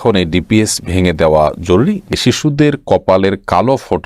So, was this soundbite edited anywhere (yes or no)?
yes